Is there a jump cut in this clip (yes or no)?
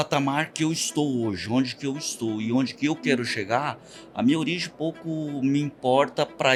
no